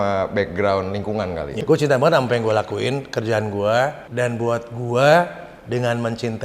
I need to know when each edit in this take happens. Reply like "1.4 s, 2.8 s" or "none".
1.6 s, 4.0 s